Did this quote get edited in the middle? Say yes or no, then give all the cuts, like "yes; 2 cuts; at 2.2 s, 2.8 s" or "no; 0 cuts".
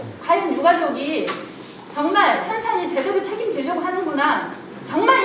no; 0 cuts